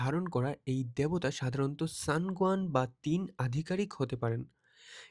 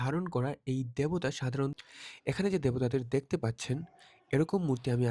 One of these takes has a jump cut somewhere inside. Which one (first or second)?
second